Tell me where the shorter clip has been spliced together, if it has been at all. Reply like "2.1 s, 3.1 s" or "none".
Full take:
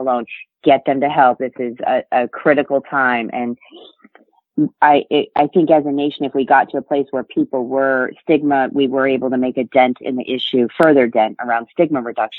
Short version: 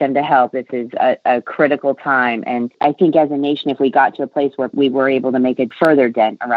2.7 s, 4.7 s, 5.7 s